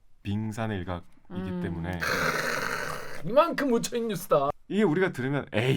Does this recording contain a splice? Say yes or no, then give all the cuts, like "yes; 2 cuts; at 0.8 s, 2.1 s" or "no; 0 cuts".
yes; 1 cut; at 4.5 s